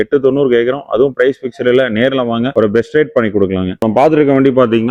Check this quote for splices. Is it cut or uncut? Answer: uncut